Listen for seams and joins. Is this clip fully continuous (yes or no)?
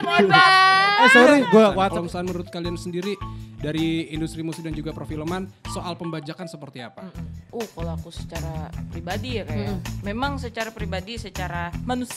no